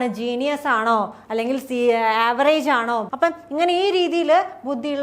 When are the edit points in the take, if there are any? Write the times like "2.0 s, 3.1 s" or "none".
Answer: 3.1 s